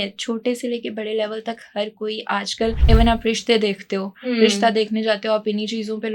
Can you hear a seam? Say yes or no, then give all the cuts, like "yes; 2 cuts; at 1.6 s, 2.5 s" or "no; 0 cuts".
yes; 1 cut; at 2.8 s